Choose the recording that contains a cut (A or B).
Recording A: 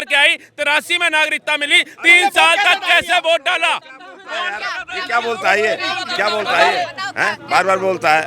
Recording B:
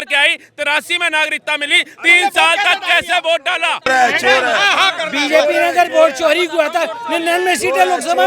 B